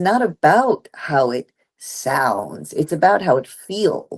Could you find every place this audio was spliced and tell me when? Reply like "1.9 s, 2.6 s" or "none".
none